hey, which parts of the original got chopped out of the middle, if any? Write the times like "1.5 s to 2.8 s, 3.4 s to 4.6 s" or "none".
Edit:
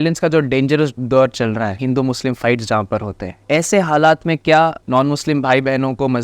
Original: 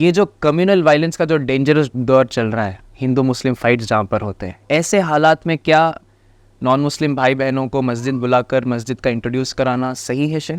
2.7 s to 3.0 s, 6.0 s to 6.5 s